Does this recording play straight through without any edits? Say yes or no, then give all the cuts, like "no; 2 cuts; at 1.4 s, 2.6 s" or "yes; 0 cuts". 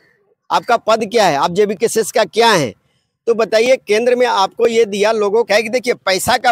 no; 1 cut; at 5.5 s